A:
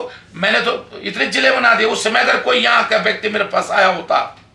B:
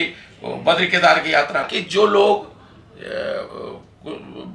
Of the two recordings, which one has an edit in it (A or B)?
B